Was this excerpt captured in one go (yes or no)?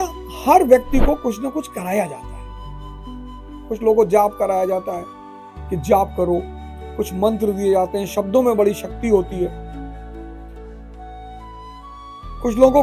yes